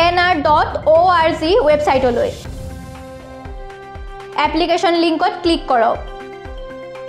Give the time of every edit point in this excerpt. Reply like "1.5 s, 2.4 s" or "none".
2.4 s, 4.3 s, 6.1 s